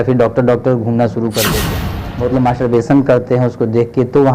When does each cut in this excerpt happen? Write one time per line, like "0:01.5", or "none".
0:01.7